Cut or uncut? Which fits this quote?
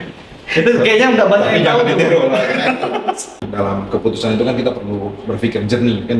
cut